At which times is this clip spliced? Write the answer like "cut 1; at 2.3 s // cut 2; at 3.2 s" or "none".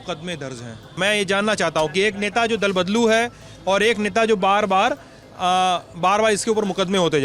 cut 1; at 0.9 s